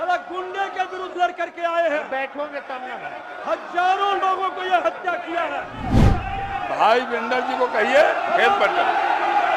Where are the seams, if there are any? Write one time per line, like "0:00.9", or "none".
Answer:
0:05.9